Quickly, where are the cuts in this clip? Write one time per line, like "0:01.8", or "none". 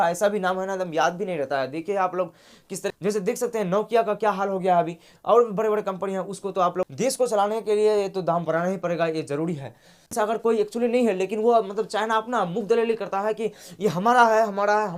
0:02.9
0:06.9
0:10.1